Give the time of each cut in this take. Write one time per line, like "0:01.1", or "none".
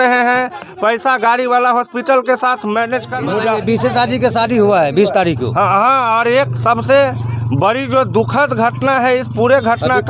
0:03.1